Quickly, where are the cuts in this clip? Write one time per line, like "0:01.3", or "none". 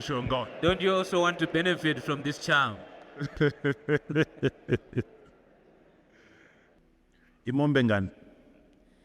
0:06.8